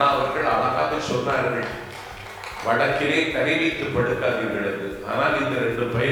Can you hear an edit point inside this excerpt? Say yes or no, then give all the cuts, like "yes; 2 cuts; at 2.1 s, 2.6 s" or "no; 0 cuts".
no; 0 cuts